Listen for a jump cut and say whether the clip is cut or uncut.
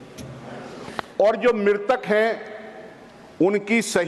uncut